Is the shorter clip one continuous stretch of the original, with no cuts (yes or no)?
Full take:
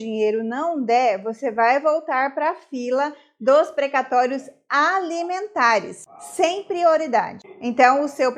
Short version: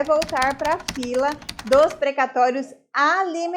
yes